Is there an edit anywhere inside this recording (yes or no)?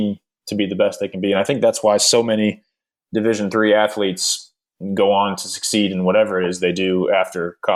no